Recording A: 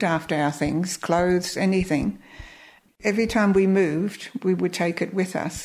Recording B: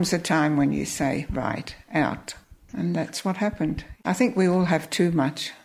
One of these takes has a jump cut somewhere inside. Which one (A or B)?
B